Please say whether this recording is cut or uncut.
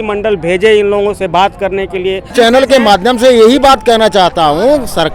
cut